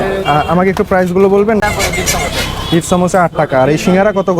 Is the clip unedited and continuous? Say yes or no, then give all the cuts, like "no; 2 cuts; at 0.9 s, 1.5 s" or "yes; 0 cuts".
no; 1 cut; at 1.6 s